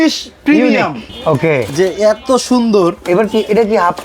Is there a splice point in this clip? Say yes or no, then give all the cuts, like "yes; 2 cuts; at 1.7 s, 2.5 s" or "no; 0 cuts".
yes; 1 cut; at 1.0 s